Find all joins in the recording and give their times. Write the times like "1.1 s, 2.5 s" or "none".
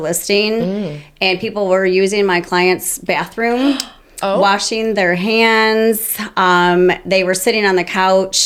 none